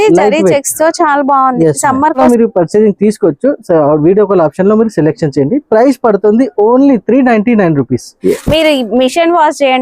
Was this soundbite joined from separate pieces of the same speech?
yes; 2 cuts; at 2.2 s, 8.1 s

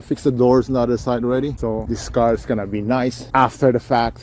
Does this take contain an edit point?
yes; 2 cuts; at 1.7 s, 3.2 s

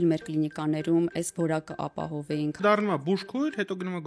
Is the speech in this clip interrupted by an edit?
yes; 1 cut; at 2.6 s

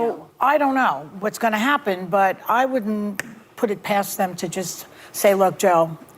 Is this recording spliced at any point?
yes; 1 cut; at 2.0 s

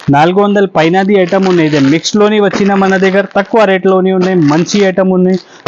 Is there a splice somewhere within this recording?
no; 0 cuts

